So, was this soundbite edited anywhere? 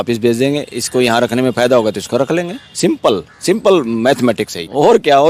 no; 0 cuts

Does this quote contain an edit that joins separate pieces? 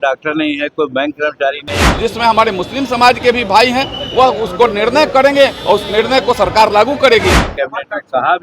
yes; 2 cuts; at 1.8 s, 7.4 s

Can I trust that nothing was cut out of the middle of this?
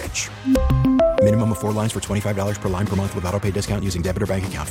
yes; 0 cuts

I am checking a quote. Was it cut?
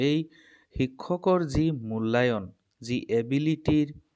no; 0 cuts

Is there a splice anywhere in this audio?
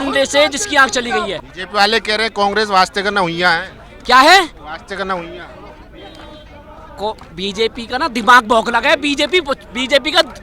yes; 1 cut; at 1.4 s

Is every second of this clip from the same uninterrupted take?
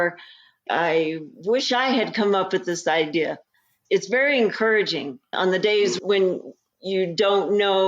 no; 1 cut; at 5.2 s

